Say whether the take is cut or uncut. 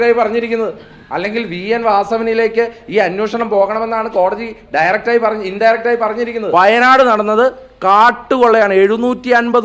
cut